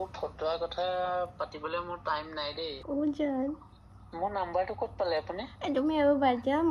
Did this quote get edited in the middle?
yes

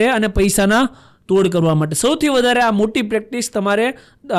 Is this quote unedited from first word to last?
yes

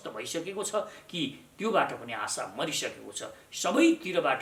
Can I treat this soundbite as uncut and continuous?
yes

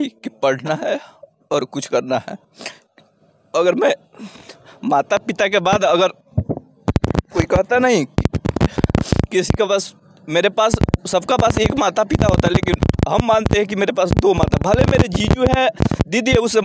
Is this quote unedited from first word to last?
no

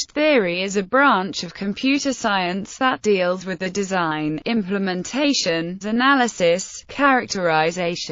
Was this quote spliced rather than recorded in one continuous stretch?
no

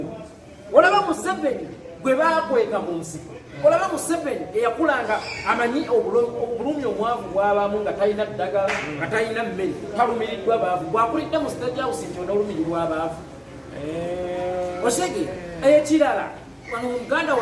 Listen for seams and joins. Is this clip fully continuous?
yes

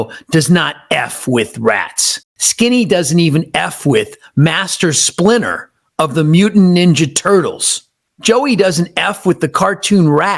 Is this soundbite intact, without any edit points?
yes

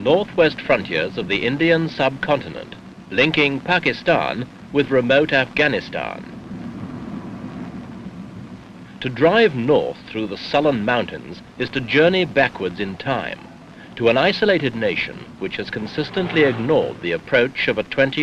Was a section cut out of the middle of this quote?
yes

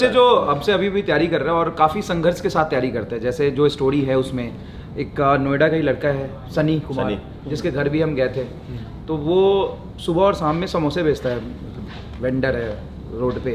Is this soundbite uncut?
yes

